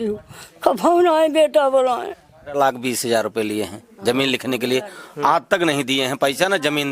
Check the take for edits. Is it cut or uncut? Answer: cut